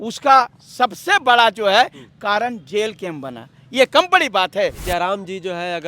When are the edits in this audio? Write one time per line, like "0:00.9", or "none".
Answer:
0:04.8